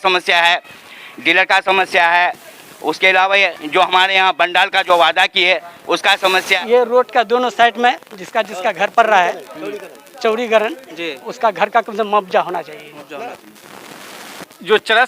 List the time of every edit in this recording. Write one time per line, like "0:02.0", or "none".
0:06.6
0:13.4